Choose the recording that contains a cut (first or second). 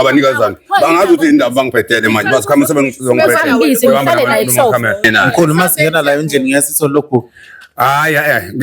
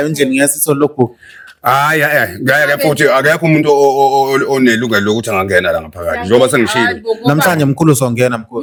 first